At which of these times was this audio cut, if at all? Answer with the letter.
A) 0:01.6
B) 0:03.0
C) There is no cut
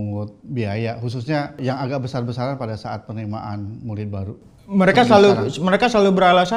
A